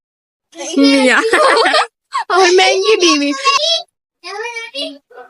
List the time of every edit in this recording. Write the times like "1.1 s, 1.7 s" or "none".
3.6 s